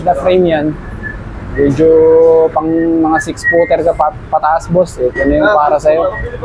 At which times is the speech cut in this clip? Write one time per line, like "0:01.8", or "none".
none